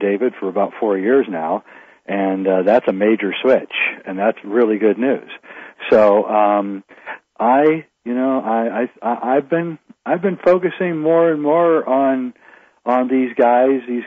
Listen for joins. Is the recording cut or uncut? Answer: cut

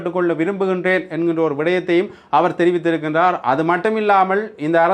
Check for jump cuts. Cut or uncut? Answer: uncut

